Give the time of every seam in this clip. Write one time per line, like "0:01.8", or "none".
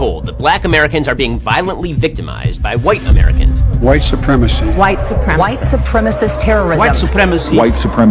none